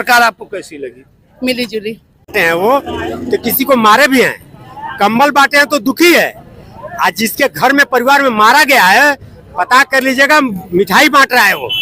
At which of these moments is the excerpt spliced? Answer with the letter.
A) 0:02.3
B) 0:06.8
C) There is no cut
A